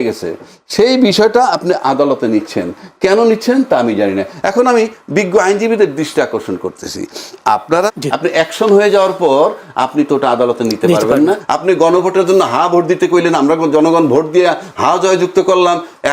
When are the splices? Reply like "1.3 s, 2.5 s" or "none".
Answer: 7.9 s, 11.5 s